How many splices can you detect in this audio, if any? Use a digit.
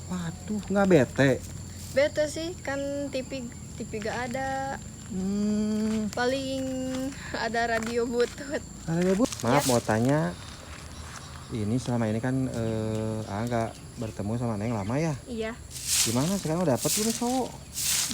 1